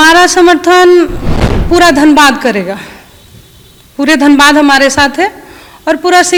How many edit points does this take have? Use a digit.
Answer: 0